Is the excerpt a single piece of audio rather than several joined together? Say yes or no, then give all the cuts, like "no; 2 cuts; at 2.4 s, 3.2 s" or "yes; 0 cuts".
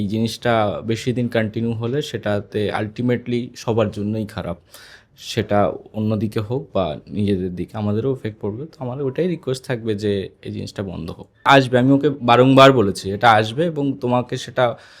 no; 1 cut; at 11.5 s